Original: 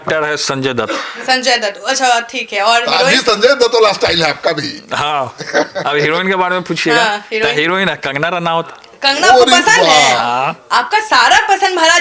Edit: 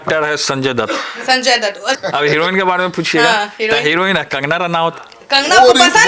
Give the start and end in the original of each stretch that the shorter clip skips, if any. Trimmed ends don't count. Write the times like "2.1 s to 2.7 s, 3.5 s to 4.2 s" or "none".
2.0 s to 5.7 s